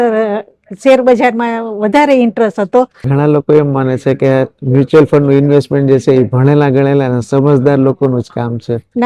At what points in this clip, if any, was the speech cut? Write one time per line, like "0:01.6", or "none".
0:03.0